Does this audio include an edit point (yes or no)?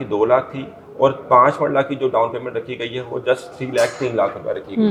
no